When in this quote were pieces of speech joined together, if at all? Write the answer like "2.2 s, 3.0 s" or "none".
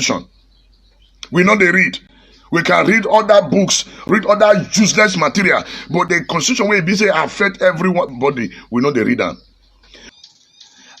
10.0 s